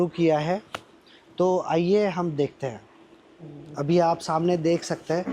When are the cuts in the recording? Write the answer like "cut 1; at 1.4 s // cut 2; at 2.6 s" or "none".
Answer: none

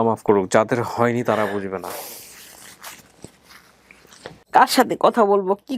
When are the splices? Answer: none

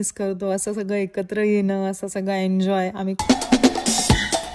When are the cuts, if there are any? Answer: cut 1; at 3.2 s

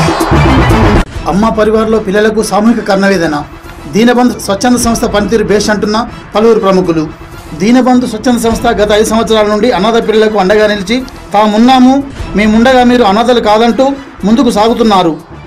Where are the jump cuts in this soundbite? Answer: cut 1; at 1.0 s

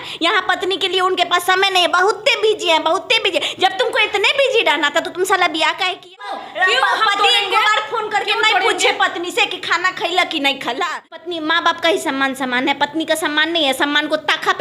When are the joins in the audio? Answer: cut 1; at 6.5 s // cut 2; at 11.2 s

